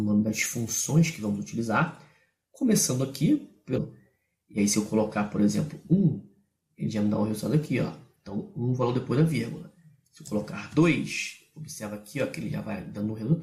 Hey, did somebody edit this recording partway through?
no; 0 cuts

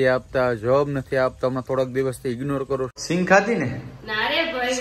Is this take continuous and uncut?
no; 1 cut; at 2.9 s

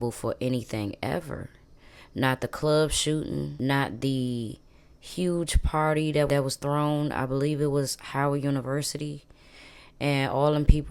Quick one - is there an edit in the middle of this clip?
no; 0 cuts

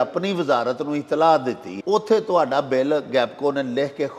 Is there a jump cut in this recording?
yes; 1 cut; at 1.7 s

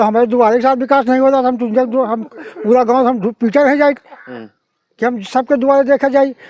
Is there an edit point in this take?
no; 0 cuts

